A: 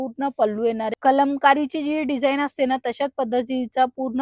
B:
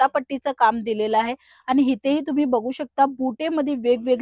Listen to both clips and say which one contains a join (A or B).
A